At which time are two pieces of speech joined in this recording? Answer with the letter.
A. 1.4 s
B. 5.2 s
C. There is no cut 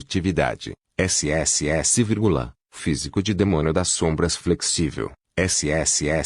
C